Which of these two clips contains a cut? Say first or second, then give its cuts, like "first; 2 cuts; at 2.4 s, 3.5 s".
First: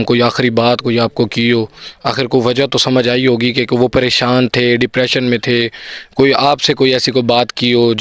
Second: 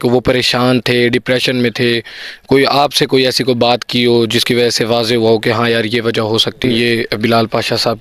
second; 1 cut; at 6.6 s